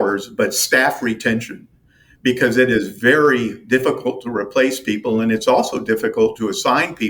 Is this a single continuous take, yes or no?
yes